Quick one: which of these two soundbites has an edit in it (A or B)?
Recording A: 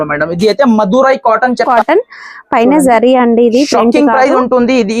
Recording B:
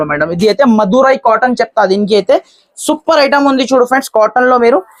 A